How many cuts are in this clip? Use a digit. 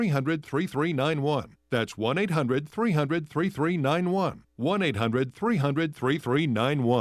1